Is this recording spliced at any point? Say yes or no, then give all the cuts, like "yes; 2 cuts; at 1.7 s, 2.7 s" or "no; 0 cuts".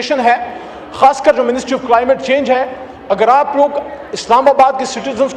no; 0 cuts